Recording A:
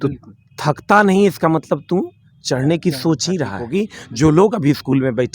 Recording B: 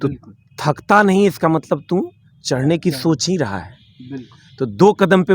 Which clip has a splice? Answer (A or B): A